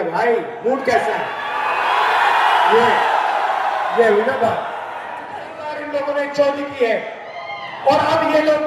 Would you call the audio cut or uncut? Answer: cut